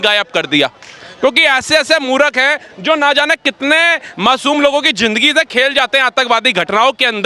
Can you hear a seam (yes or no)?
no